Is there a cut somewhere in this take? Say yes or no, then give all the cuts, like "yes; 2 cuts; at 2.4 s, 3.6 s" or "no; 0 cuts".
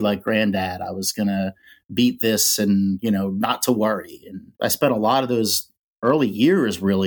yes; 1 cut; at 4.5 s